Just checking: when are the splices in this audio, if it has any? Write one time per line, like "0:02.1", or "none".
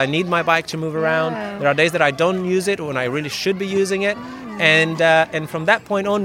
none